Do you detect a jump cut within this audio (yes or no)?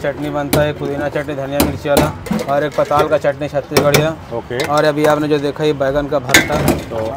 no